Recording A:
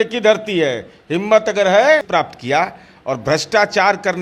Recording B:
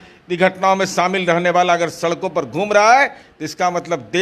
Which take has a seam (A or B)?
A